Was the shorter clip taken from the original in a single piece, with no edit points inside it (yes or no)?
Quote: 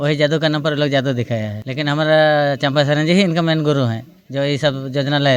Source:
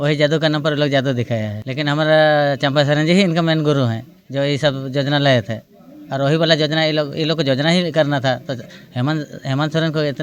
yes